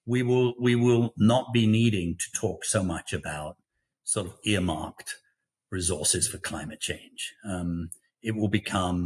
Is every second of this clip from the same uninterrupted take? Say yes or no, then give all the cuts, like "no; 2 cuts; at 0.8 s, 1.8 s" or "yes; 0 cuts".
yes; 0 cuts